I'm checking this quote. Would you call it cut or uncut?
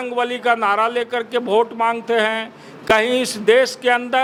uncut